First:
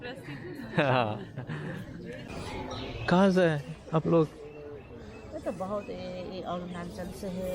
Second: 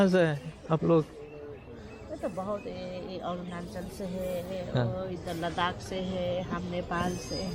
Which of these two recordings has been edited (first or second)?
first